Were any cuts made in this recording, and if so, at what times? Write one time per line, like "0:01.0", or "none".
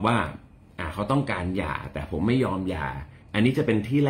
0:03.2